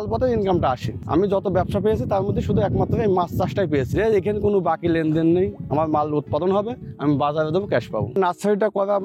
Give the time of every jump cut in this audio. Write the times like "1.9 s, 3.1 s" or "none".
0.9 s, 8.2 s